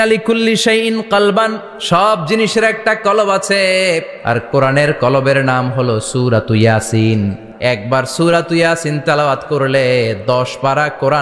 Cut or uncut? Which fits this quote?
cut